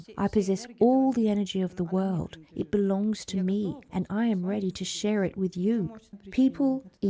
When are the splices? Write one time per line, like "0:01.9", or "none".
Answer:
0:06.0

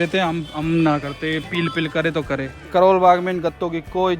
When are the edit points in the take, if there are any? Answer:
0:02.6

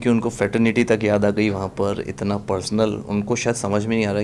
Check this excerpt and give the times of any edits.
none

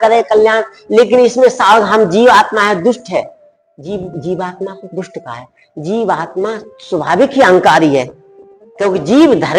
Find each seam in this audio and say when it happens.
none

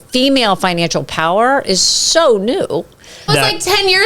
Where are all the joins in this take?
0:03.2

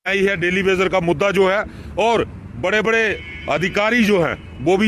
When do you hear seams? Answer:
0:03.8

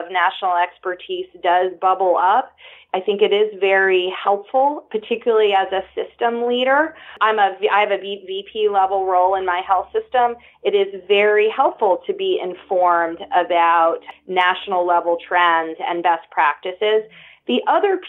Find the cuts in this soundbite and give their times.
0:07.1
0:14.1

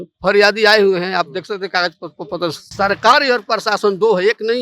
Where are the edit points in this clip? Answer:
0:02.6

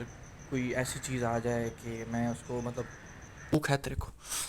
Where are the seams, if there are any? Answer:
0:03.5

